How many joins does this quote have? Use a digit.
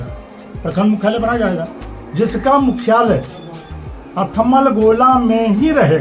0